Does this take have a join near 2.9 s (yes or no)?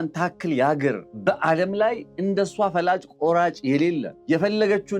no